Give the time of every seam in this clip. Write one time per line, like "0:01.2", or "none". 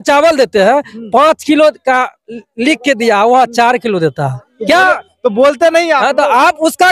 none